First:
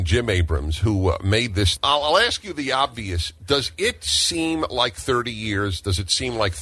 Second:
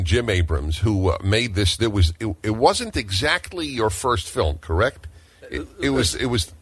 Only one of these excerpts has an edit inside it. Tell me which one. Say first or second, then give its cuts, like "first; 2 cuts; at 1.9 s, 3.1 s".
first; 1 cut; at 1.7 s